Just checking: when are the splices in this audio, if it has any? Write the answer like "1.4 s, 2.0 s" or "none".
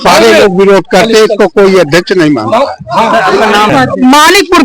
3.7 s